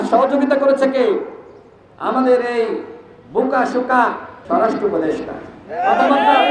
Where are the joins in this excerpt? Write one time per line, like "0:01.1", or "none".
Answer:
0:04.3